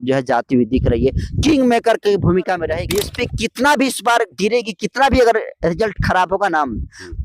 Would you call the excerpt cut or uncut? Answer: cut